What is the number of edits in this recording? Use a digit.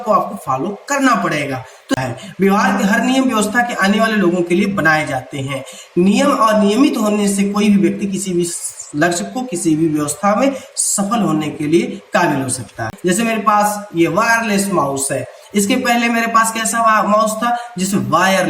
2